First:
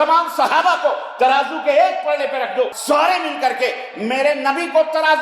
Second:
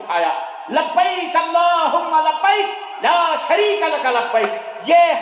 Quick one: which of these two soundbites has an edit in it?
first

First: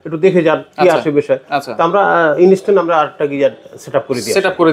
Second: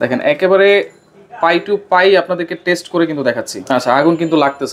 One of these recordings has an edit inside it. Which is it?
second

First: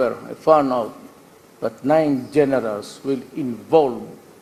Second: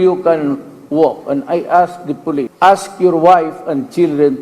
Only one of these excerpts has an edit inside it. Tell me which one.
second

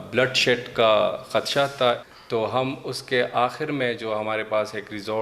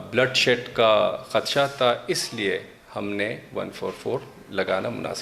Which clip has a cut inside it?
first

